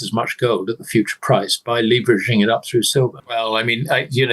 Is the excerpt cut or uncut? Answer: uncut